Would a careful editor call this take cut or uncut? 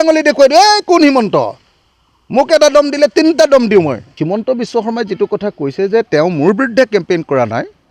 cut